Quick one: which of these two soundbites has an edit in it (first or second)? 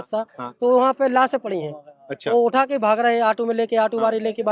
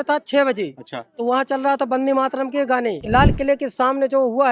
second